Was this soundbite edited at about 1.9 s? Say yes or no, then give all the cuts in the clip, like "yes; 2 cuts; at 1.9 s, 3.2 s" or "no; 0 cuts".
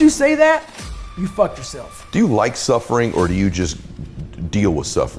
yes; 1 cut; at 1.9 s